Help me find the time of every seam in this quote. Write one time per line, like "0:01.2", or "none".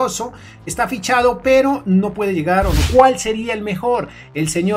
0:02.8